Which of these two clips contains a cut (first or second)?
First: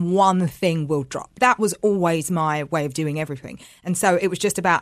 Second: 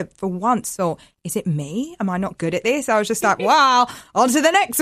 first